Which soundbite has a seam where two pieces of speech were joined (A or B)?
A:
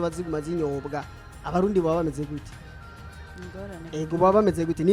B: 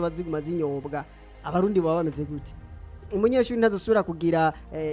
B